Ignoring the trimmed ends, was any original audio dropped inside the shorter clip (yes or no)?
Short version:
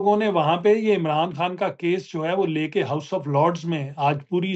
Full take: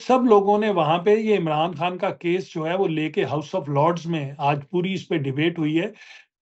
no